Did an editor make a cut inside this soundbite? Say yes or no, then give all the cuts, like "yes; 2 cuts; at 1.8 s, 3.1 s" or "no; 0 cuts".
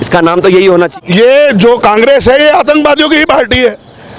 yes; 1 cut; at 0.9 s